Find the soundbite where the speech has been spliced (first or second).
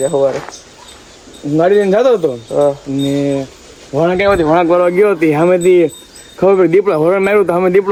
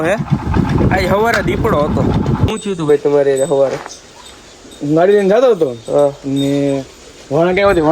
second